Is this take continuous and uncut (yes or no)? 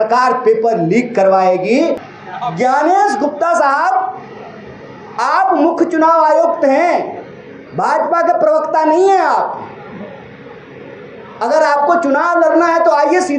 no